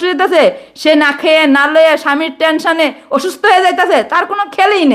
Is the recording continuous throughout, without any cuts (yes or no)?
yes